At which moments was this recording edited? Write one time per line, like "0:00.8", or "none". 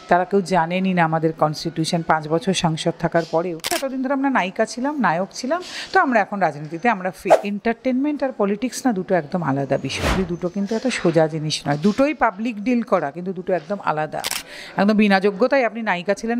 0:03.8
0:07.4
0:10.2
0:14.4